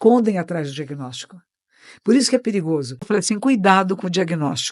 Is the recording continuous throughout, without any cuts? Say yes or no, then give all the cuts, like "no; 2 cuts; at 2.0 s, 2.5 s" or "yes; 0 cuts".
no; 1 cut; at 3.0 s